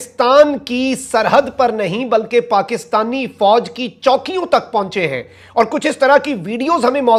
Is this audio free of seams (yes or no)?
yes